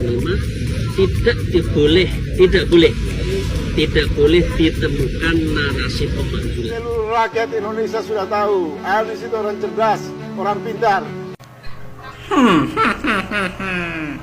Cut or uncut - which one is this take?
cut